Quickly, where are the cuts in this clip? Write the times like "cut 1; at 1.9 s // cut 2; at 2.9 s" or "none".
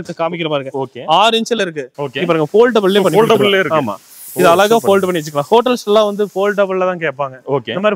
cut 1; at 2.0 s